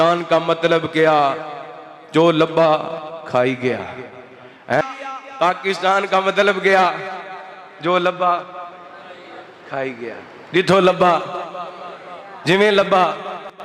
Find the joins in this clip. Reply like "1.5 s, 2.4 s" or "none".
4.8 s